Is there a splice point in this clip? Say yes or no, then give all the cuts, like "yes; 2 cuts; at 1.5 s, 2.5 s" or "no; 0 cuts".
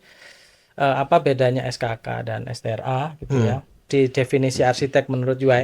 yes; 1 cut; at 3.9 s